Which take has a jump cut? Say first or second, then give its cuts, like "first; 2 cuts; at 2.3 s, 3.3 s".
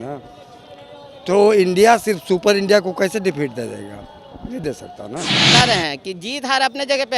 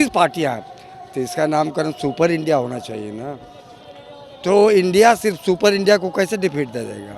first; 1 cut; at 5.5 s